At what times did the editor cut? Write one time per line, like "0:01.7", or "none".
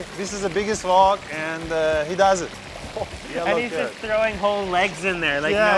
none